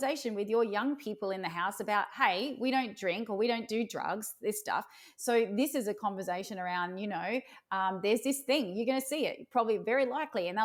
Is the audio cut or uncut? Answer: uncut